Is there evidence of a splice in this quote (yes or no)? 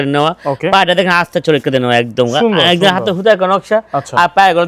no